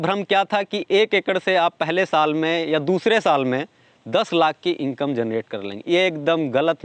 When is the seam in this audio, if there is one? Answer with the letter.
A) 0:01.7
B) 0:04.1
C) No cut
C